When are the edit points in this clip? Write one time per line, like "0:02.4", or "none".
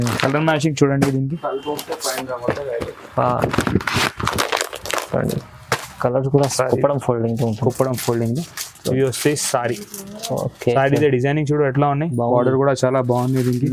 0:06.5